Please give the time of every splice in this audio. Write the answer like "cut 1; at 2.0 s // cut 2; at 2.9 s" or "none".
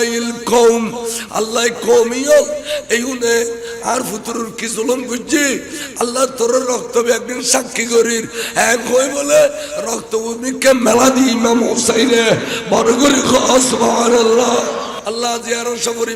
cut 1; at 15.0 s